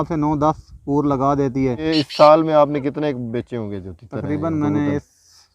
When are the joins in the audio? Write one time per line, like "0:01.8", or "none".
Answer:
0:01.8